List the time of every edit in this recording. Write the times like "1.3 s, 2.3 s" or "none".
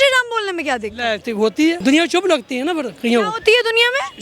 1.8 s

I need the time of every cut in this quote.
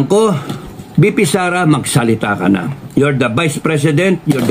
none

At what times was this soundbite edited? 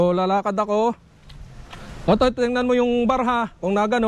none

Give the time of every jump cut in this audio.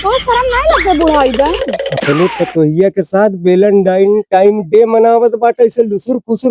1.9 s

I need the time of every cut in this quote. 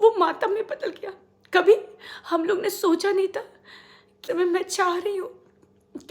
4.2 s

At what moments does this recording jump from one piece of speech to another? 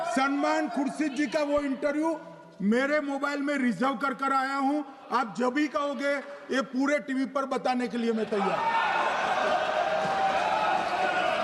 none

